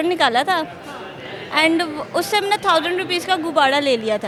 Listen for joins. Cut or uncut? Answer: uncut